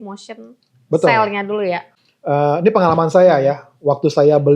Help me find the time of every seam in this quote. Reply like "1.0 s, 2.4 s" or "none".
1.9 s